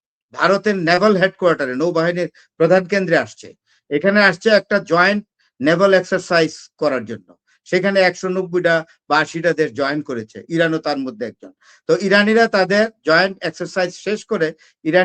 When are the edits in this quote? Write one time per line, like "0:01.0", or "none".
none